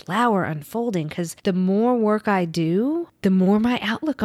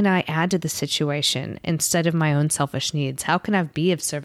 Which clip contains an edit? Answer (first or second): first